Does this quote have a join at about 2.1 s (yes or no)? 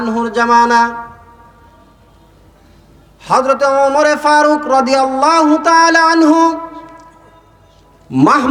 no